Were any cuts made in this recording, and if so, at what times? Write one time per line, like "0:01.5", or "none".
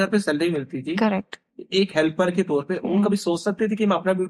none